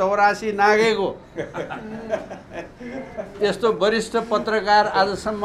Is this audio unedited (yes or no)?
yes